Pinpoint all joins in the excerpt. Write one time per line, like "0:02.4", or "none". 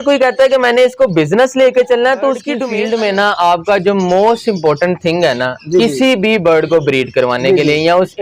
0:02.5